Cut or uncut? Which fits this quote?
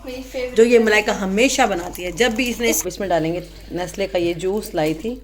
cut